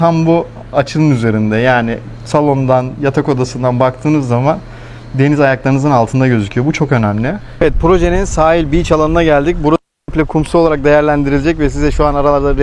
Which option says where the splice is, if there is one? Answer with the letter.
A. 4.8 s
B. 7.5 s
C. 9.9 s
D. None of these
B